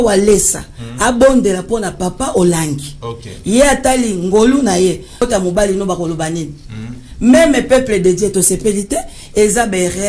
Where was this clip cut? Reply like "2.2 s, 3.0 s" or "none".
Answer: 5.2 s